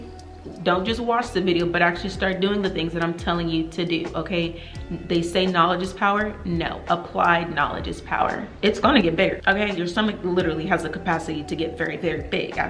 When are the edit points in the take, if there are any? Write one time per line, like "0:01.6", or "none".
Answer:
0:08.4
0:09.4